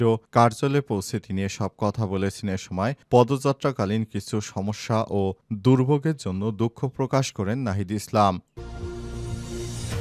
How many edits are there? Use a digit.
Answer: 1